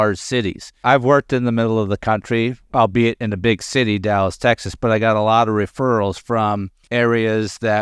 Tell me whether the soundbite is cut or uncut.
cut